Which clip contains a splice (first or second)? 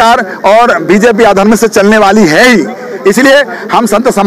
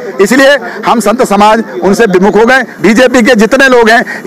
second